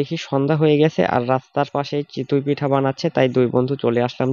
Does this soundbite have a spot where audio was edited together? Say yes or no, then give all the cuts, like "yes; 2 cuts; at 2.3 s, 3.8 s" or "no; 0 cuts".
no; 0 cuts